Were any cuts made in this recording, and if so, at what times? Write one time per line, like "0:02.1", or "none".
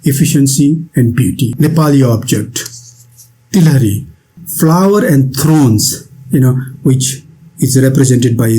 0:01.5
0:04.3